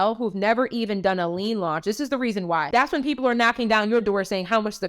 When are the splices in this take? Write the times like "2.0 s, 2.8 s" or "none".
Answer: 2.7 s

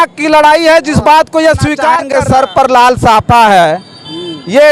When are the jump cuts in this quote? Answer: 2.0 s

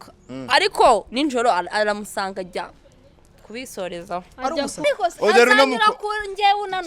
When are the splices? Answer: 4.8 s

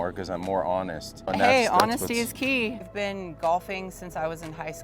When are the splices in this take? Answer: 1.3 s, 2.8 s

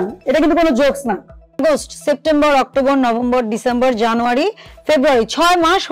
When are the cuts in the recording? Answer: 1.6 s

